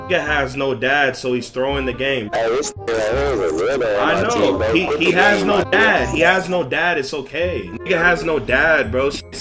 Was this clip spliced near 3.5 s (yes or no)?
no